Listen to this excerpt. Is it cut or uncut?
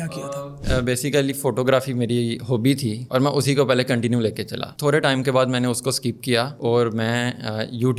uncut